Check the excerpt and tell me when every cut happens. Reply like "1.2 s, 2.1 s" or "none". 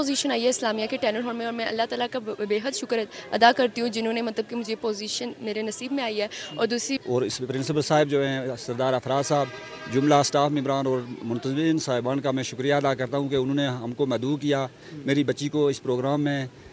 6.9 s

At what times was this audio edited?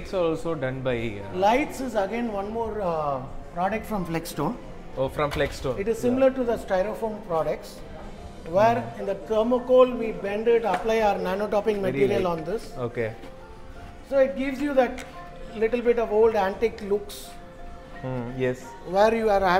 none

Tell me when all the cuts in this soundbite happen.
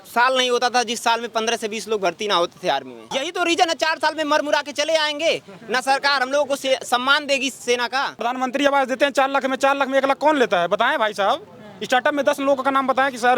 3.1 s, 8.3 s

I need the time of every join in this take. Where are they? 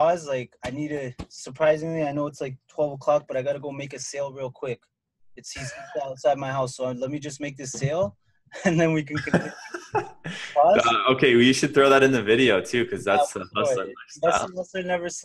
none

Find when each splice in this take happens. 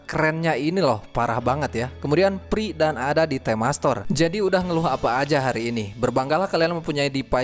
4.1 s

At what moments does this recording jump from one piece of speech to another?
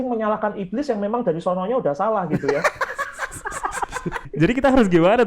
4.2 s

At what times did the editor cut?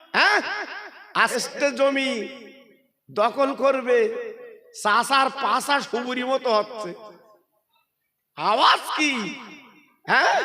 1.4 s

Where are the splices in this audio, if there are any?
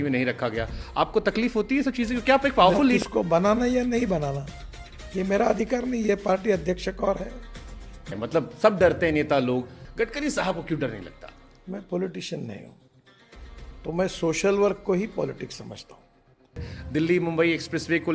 3.0 s, 8.1 s, 9.8 s, 16.7 s

